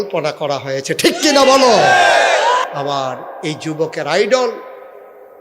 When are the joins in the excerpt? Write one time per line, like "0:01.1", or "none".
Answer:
0:02.7